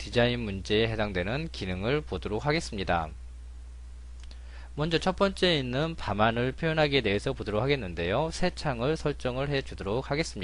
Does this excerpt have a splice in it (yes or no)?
no